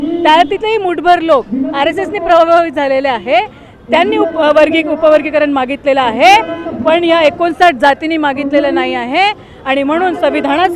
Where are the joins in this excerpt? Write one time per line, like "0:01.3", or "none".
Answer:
none

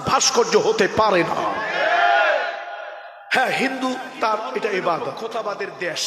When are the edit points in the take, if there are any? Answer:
0:05.2

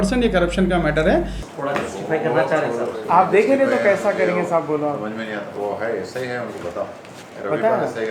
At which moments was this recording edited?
0:01.4

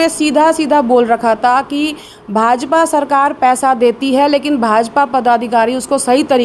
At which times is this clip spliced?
none

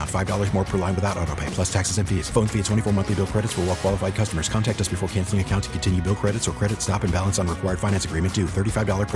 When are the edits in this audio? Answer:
none

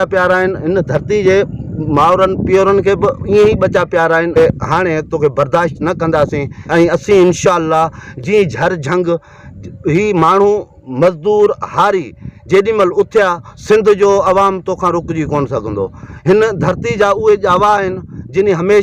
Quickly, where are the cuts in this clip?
0:04.4
0:06.5
0:13.5

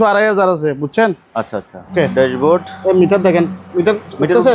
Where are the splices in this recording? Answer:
0:01.9

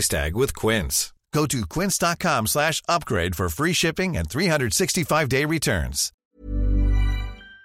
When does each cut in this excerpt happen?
0:06.2

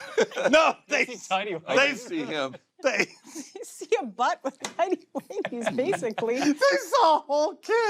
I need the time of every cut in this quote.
none

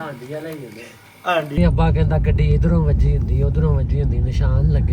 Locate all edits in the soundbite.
0:01.6

